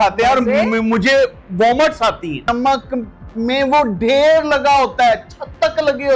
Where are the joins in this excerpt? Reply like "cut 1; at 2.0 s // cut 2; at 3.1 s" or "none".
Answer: cut 1; at 2.5 s